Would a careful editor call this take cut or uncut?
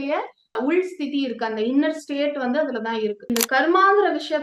cut